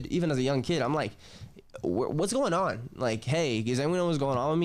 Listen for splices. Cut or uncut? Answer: uncut